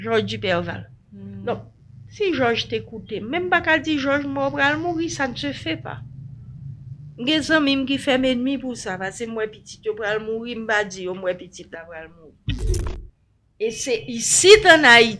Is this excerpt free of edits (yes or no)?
no